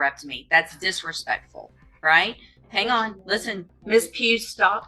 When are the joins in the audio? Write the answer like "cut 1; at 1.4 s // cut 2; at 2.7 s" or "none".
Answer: cut 1; at 3.7 s